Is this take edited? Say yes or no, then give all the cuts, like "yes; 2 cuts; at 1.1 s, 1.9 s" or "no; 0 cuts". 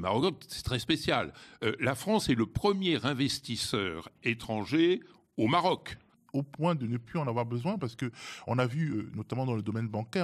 yes; 1 cut; at 6.1 s